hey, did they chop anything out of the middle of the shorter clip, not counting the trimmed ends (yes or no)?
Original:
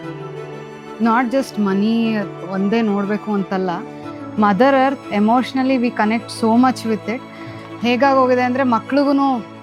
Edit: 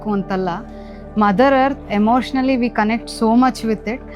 no